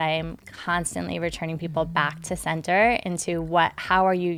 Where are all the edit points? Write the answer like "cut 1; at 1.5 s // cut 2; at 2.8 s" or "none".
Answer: none